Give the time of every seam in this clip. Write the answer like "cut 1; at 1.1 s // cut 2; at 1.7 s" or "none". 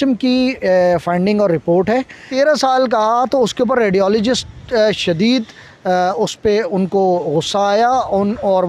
cut 1; at 2.3 s